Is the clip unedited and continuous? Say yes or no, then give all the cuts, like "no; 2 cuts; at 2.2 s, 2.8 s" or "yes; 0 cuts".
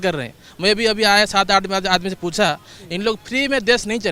yes; 0 cuts